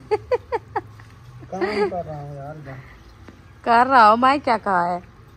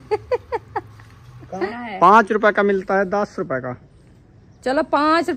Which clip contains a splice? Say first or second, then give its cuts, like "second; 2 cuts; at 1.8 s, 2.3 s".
second; 1 cut; at 1.7 s